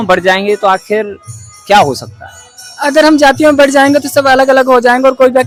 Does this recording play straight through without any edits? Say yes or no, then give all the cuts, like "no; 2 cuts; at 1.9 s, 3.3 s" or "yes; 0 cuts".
yes; 0 cuts